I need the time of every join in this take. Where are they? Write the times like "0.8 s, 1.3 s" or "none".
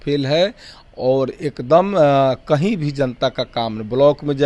none